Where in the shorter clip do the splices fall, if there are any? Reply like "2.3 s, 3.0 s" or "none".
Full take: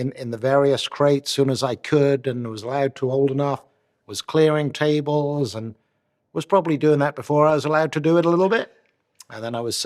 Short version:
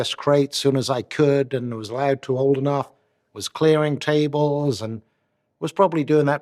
none